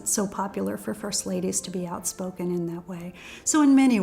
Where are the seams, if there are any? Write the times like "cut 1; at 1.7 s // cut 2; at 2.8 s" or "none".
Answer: none